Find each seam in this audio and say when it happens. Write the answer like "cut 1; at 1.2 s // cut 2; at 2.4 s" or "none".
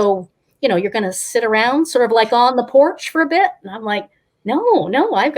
none